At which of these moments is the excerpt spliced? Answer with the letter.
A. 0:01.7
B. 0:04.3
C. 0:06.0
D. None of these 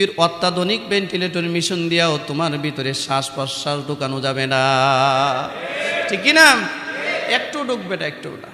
D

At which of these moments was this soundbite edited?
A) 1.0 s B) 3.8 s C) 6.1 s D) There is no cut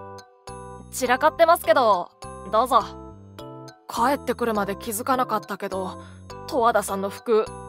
A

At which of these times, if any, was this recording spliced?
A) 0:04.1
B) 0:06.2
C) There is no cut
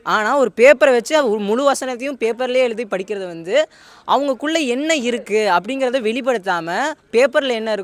C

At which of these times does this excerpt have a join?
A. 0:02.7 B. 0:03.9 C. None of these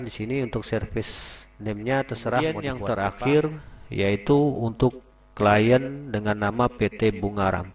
A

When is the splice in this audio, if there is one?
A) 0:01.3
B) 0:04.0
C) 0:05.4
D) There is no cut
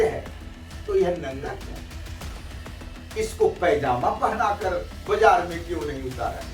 D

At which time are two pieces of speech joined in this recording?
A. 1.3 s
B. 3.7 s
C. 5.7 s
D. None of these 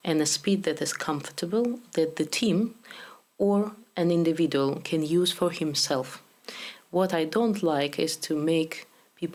D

